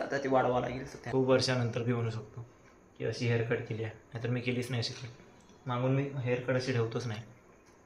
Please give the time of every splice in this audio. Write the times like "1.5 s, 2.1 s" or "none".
0.9 s